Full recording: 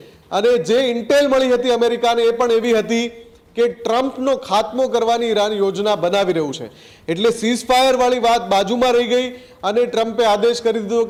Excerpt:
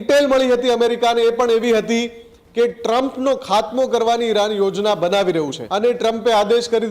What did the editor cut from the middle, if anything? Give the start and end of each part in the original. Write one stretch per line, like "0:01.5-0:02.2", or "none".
0:06.6-0:09.5